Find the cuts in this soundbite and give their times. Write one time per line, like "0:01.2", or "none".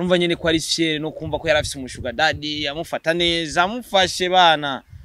none